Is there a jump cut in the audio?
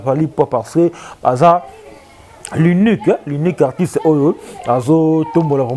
no; 0 cuts

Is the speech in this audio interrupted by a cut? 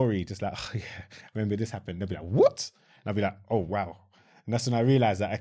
no; 0 cuts

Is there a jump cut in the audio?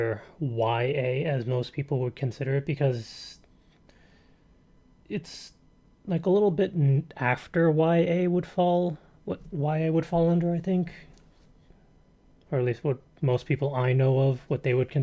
yes; 1 cut; at 4.8 s

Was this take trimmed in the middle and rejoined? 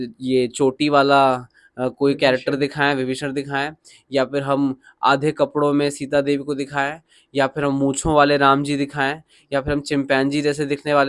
no; 0 cuts

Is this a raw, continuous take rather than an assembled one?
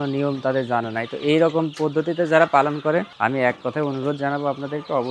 no; 1 cut; at 3.1 s

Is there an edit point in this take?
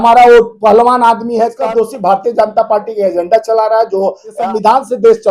yes; 2 cuts; at 1.6 s, 4.4 s

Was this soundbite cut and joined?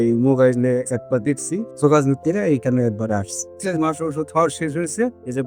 yes; 2 cuts; at 1.7 s, 3.5 s

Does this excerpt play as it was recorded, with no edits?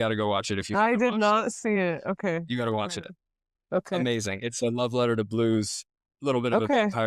yes; 0 cuts

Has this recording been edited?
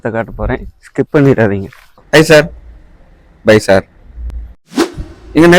yes; 1 cut; at 2.0 s

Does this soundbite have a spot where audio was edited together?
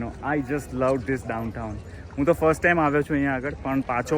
no; 0 cuts

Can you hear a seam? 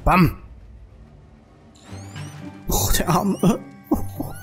no; 0 cuts

